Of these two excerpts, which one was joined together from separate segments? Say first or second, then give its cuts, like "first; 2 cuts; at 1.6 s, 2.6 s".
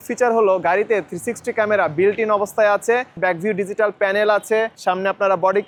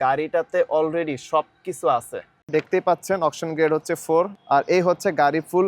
second; 2 cuts; at 2.4 s, 4.3 s